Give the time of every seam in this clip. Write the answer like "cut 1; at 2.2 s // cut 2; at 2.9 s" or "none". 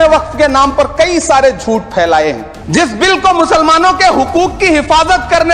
cut 1; at 2.5 s